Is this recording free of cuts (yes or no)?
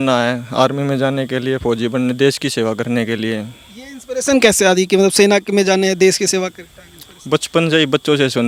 yes